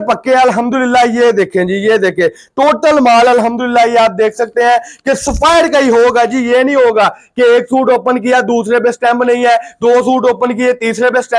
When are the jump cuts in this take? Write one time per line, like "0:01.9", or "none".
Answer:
none

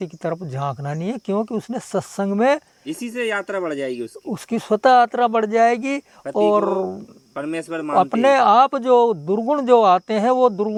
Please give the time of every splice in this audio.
none

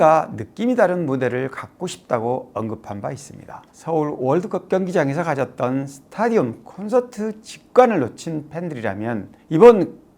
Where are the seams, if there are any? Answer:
0:03.6

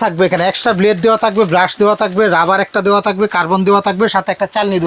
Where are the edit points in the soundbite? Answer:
none

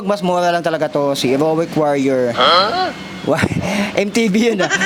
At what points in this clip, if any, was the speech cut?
none

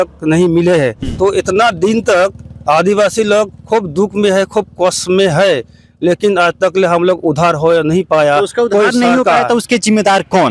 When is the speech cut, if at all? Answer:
0:01.0

